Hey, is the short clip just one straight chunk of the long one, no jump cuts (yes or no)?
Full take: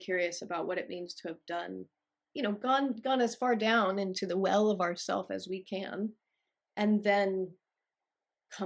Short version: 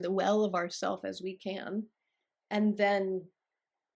yes